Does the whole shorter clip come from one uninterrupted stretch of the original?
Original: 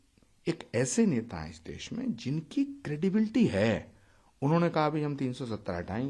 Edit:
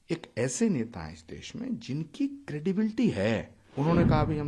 no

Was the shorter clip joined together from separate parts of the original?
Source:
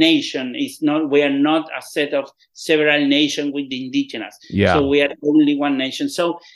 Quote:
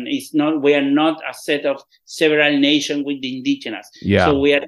no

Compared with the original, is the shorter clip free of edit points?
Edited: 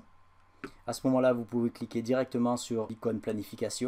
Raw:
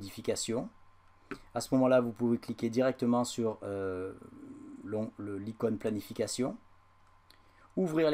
no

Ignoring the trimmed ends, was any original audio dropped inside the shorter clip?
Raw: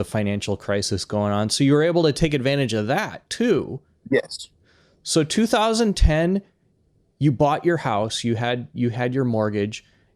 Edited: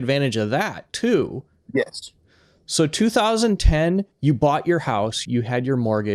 yes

